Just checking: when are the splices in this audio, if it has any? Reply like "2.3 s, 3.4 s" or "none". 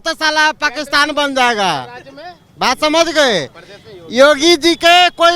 none